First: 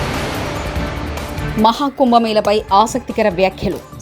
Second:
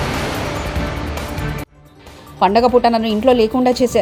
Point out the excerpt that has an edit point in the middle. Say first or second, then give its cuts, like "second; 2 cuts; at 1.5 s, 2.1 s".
first; 1 cut; at 1.5 s